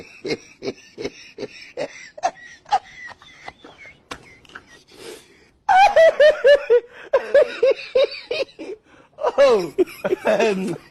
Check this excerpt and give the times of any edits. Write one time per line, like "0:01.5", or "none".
none